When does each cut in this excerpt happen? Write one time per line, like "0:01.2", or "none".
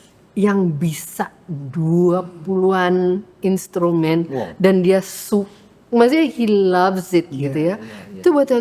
none